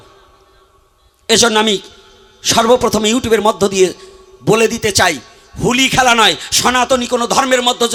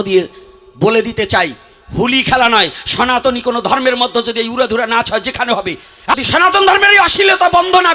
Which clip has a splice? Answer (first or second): second